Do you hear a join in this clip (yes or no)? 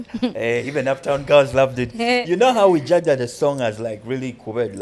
no